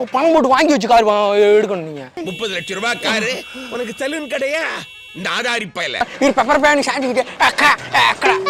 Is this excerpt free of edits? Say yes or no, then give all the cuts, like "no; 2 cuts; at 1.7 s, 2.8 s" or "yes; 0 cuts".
no; 1 cut; at 6.1 s